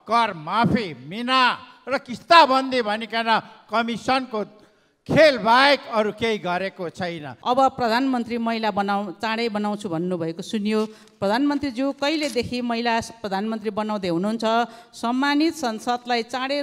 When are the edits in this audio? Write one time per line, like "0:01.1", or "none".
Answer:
0:07.3